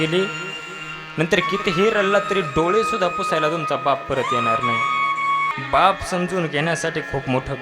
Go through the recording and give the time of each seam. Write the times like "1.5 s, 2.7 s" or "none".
5.5 s